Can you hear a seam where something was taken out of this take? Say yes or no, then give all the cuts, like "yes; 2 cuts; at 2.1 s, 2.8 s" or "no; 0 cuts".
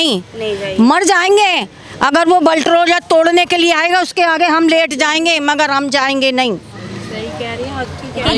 no; 0 cuts